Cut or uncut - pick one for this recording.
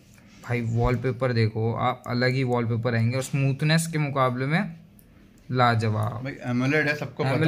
uncut